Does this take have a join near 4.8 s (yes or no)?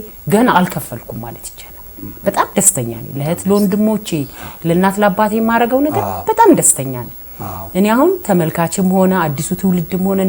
no